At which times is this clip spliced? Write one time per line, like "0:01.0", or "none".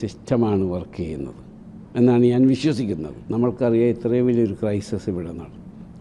0:03.2